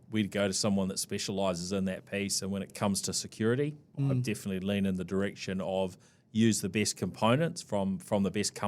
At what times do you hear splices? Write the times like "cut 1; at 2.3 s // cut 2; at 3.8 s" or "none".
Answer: cut 1; at 2.7 s // cut 2; at 3.9 s